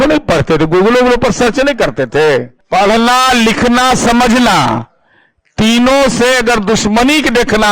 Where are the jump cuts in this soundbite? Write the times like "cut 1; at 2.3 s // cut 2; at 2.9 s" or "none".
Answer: cut 1; at 2.6 s